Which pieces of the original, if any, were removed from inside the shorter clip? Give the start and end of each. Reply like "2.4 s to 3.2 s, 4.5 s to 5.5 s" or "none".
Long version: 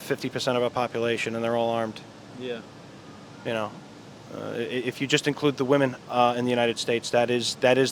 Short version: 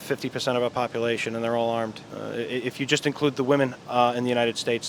2.1 s to 4.3 s

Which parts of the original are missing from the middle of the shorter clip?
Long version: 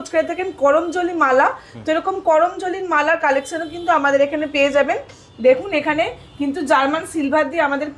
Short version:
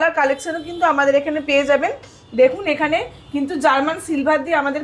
none

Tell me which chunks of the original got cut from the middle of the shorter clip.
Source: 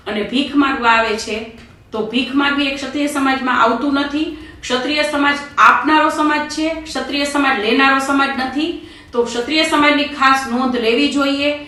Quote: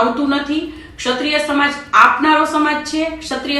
none

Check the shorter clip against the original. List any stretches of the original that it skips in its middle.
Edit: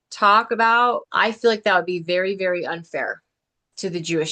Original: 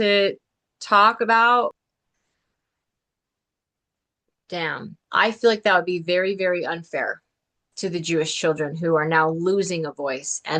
1.8 s to 5.1 s

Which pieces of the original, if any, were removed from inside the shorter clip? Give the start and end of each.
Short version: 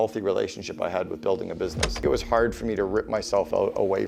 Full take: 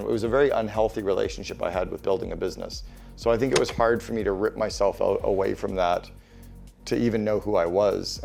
2.8 s to 3.5 s

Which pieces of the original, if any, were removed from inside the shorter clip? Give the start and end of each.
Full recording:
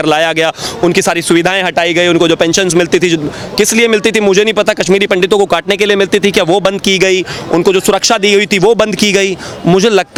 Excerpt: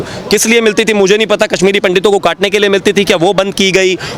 none

